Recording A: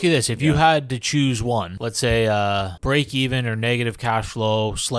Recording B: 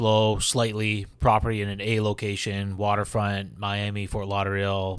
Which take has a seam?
A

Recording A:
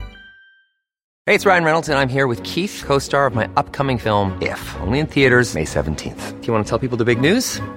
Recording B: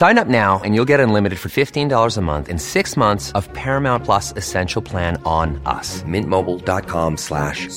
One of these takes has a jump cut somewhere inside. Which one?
A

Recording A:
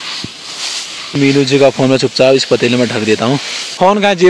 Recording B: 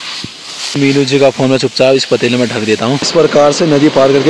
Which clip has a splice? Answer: B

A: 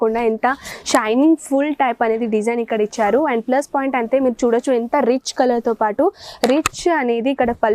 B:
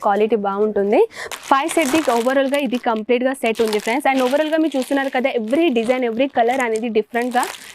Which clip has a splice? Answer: B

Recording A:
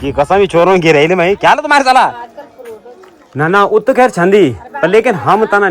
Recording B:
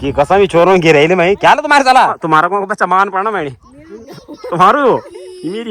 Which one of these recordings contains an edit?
A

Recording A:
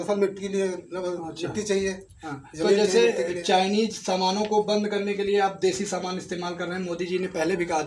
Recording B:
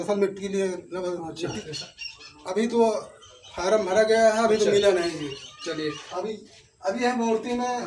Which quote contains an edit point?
B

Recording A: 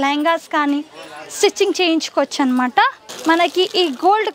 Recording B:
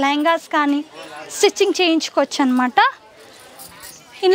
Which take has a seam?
A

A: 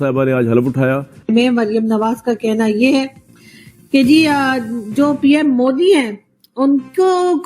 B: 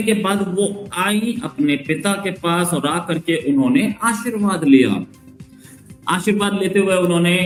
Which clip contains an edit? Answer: A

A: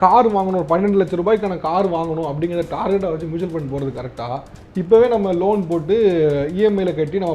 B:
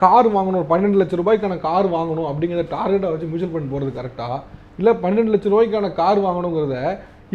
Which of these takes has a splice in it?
A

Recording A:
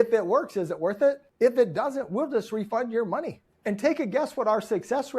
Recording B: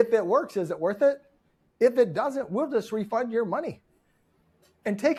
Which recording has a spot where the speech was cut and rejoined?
A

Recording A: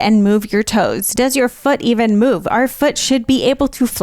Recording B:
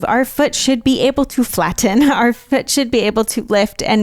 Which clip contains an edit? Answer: A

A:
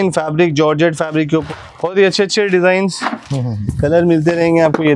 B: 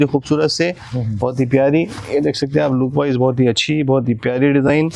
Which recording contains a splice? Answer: A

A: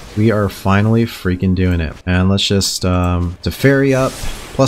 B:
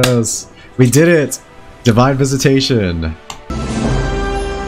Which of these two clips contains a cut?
A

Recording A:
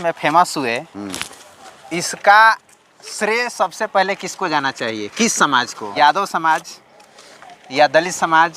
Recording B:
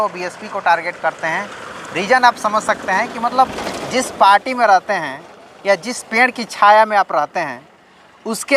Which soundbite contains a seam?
A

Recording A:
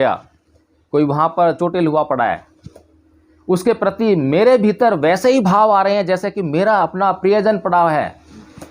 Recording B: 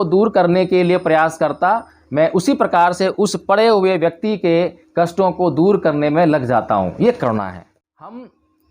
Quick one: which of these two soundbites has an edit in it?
B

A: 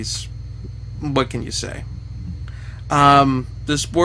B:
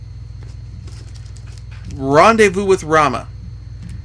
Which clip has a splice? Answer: A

